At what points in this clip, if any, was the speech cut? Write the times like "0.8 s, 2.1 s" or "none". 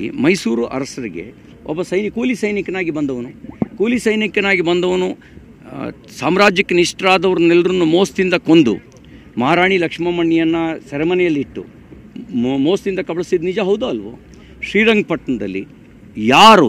none